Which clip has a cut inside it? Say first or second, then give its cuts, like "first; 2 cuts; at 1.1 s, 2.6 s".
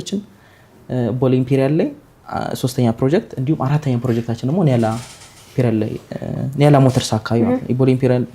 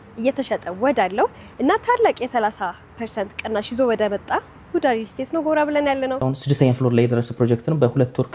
second; 1 cut; at 6.2 s